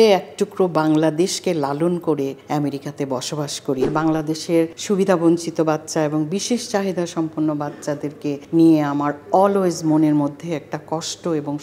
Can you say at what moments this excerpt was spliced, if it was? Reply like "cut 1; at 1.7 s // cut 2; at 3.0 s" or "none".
cut 1; at 2.4 s // cut 2; at 3.8 s // cut 3; at 4.8 s // cut 4; at 8.4 s